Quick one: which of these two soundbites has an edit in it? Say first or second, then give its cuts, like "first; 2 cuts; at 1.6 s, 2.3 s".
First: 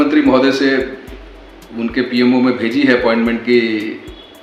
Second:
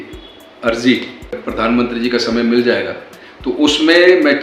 second; 1 cut; at 1.4 s